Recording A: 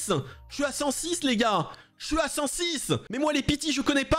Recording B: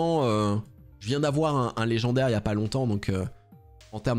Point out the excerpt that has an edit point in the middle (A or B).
A